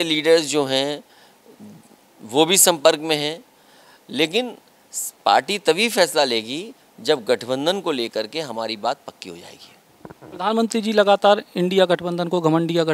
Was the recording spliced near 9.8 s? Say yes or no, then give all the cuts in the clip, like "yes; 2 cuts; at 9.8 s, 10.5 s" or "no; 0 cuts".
no; 0 cuts